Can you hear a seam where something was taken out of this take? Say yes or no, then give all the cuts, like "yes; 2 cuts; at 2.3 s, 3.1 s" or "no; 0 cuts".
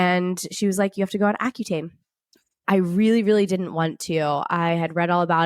yes; 1 cut; at 2.6 s